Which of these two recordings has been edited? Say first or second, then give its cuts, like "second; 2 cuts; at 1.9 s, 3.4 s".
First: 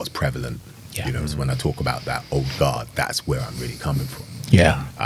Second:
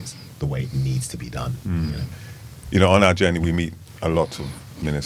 second; 1 cut; at 2.2 s